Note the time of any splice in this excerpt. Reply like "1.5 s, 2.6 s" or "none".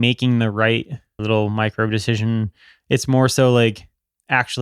1.2 s